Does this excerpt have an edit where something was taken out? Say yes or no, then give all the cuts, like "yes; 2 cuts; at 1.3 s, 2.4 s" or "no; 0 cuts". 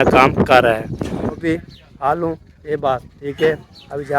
yes; 1 cut; at 1.3 s